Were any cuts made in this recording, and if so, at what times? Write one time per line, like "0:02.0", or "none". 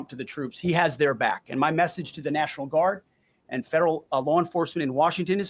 none